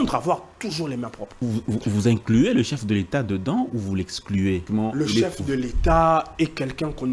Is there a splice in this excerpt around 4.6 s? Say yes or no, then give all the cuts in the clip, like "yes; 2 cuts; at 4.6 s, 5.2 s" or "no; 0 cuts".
yes; 2 cuts; at 1.3 s, 4.6 s